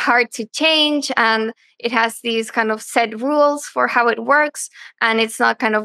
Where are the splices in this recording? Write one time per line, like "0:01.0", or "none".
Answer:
none